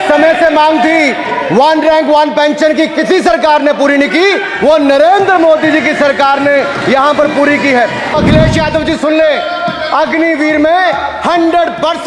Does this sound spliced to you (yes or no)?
yes